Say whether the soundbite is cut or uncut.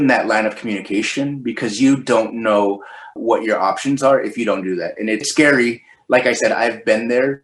uncut